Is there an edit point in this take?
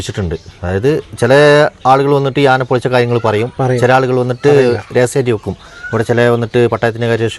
no; 0 cuts

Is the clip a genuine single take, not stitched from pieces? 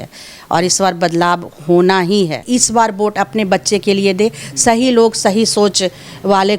no; 1 cut; at 2.4 s

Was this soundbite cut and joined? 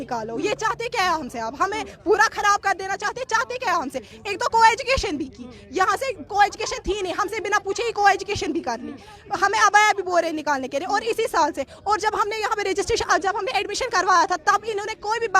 no; 0 cuts

